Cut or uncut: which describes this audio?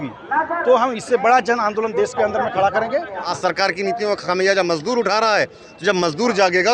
cut